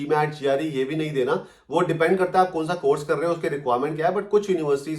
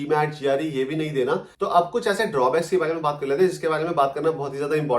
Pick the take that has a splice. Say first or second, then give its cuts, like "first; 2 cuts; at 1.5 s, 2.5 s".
second; 1 cut; at 1.5 s